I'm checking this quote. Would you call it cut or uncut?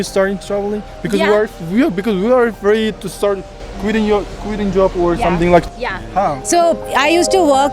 cut